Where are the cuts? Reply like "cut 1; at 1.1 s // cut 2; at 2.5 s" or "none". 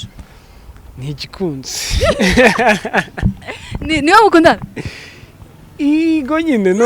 none